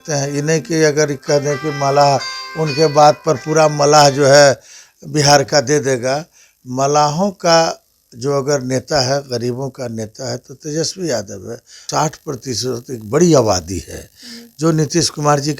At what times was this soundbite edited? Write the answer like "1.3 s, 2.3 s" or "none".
11.8 s